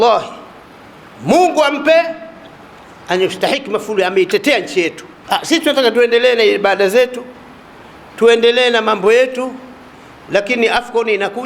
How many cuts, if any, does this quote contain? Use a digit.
1